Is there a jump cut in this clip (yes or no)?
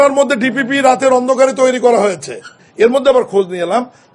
yes